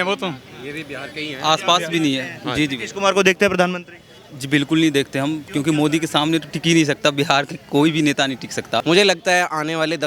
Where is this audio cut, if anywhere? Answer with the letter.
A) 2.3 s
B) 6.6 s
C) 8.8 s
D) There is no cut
C